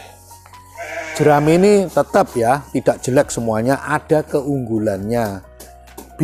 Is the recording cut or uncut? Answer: uncut